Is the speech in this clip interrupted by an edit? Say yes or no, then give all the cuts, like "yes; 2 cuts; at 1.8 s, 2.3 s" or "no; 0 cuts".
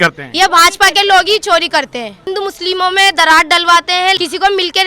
yes; 1 cut; at 2.3 s